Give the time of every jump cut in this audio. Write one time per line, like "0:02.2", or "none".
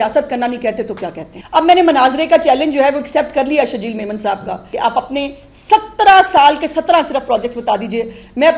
0:01.3
0:04.7